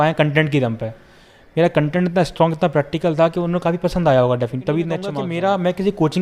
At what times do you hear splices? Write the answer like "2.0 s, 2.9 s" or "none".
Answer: 5.1 s

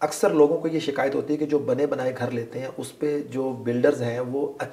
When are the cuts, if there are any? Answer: none

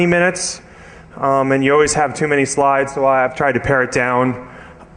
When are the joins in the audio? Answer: none

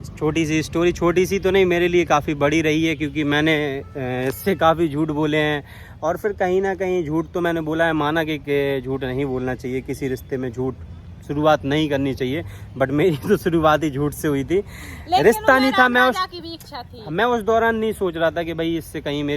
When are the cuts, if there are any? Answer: none

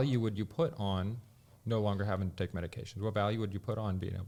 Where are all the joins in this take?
none

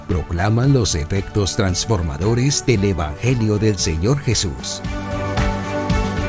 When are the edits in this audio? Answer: 4.6 s

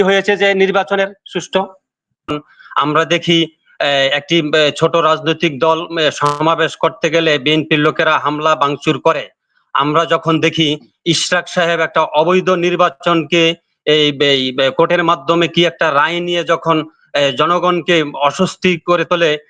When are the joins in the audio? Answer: 2.3 s

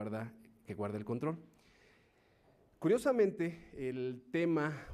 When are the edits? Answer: none

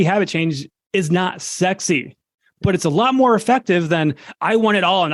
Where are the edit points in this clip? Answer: none

